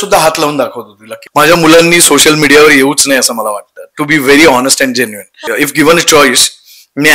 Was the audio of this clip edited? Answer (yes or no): yes